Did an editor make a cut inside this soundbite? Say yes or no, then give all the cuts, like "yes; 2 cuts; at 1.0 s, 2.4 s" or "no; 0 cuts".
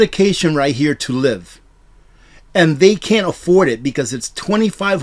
no; 0 cuts